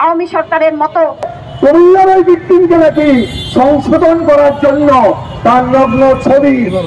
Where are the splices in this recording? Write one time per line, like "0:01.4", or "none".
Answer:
0:01.3